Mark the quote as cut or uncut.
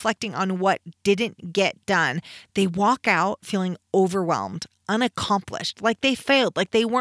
uncut